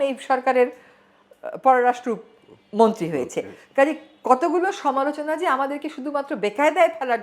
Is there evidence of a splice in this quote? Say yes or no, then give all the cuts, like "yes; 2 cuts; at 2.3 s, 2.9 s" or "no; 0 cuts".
no; 0 cuts